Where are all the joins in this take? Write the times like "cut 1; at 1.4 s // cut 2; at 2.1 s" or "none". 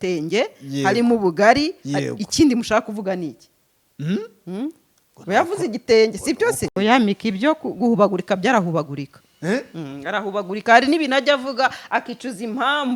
cut 1; at 6.7 s